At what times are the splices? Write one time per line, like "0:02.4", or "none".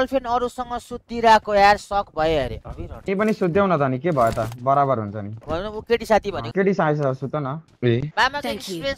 0:02.6
0:05.4
0:08.1